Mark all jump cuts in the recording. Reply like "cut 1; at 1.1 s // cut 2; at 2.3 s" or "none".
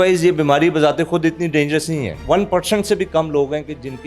cut 1; at 2.2 s